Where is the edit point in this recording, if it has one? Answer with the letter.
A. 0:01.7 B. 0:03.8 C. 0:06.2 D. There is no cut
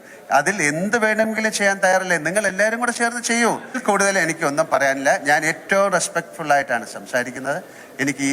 B